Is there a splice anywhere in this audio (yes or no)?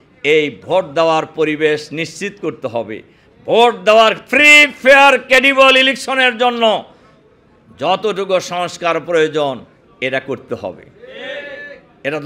no